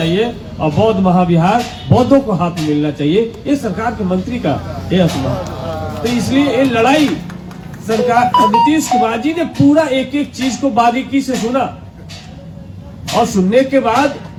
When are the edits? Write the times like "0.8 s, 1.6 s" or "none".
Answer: none